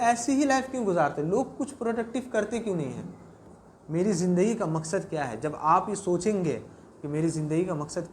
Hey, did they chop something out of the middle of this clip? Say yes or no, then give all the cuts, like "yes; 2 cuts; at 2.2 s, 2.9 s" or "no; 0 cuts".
yes; 1 cut; at 3.4 s